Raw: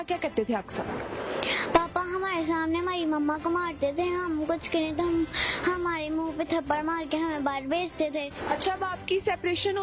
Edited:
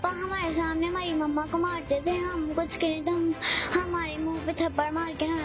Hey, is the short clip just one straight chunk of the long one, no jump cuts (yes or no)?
yes